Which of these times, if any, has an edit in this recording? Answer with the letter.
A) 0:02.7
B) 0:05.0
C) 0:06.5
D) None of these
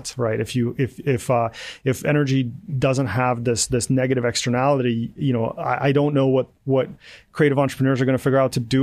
D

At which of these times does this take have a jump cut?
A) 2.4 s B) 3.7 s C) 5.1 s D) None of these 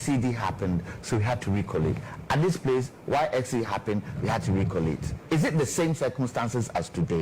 C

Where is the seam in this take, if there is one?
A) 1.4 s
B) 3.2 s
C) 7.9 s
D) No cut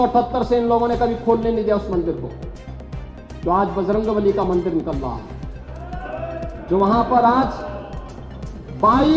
D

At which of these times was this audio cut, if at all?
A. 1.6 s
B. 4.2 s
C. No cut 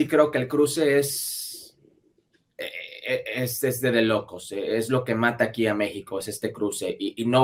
C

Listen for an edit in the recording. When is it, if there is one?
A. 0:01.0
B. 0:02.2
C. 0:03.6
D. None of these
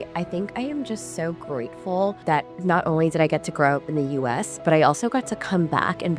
B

